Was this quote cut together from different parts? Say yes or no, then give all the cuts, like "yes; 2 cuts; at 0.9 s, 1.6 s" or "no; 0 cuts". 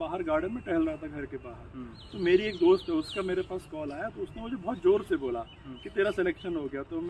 no; 0 cuts